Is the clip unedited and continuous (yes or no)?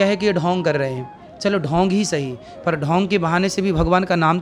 yes